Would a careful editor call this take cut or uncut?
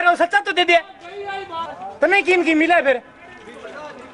cut